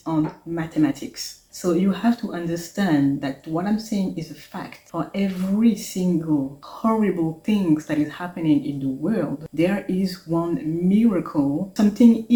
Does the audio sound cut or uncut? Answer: uncut